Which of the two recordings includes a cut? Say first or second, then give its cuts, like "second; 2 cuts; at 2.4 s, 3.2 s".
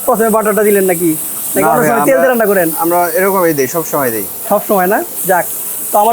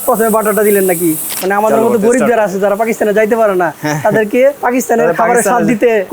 second; 2 cuts; at 1.4 s, 4.6 s